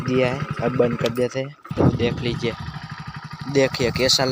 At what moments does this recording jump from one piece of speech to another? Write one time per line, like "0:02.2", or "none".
0:01.7
0:03.0